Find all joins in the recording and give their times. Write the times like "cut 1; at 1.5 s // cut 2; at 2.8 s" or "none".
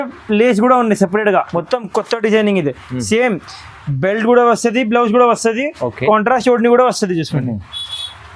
cut 1; at 1.5 s